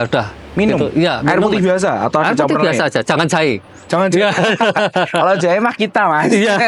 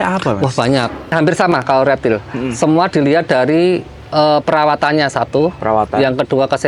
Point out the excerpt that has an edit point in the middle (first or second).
second